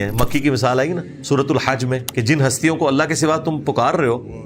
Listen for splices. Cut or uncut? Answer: cut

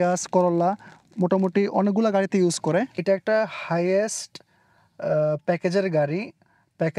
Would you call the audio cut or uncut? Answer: cut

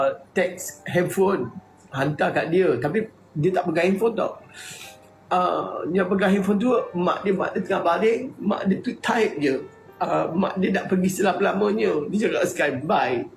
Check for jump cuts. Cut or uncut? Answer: uncut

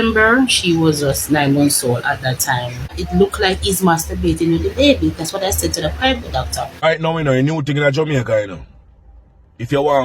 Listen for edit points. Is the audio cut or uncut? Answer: cut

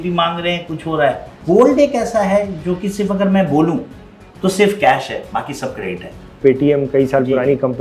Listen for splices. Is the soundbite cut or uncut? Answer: cut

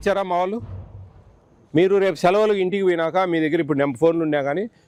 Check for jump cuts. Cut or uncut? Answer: uncut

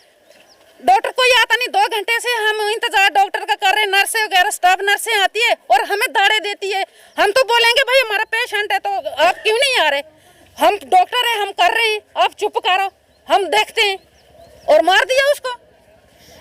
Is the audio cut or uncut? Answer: uncut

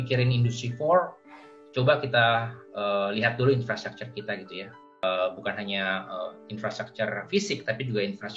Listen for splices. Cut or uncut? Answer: cut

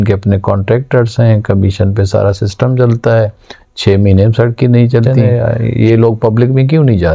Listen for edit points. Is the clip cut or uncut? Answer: cut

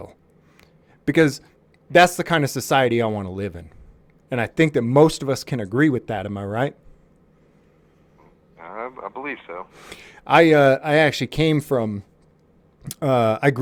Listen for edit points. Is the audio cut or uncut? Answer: uncut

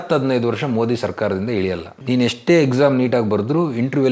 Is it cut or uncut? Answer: cut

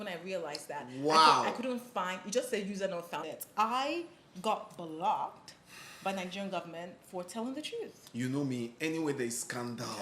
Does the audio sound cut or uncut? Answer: cut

